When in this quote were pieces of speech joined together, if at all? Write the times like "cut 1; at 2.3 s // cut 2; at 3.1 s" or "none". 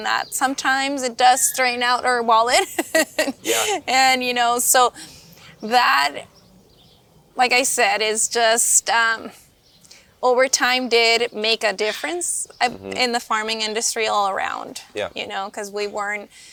none